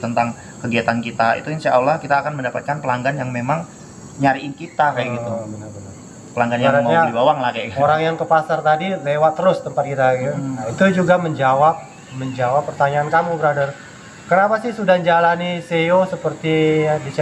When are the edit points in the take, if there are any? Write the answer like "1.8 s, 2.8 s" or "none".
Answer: 10.7 s

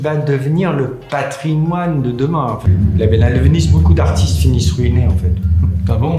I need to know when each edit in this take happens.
2.6 s

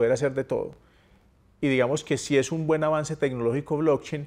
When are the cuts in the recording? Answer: none

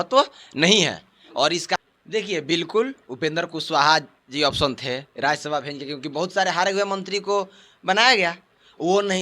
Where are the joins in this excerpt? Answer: 1.8 s

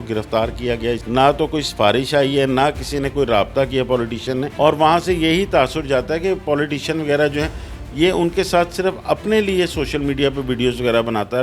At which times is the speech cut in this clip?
1.0 s, 4.5 s

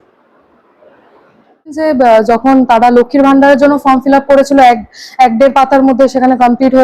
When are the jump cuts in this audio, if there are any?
1.8 s

